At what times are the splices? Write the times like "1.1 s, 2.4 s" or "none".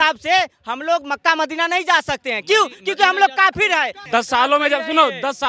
4.0 s